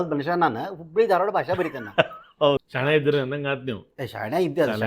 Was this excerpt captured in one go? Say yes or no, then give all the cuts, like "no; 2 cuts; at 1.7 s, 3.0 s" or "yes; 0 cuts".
no; 1 cut; at 2.6 s